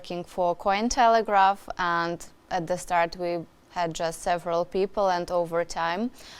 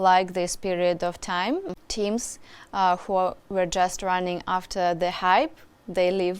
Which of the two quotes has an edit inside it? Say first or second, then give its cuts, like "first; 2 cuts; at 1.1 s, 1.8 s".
second; 1 cut; at 1.7 s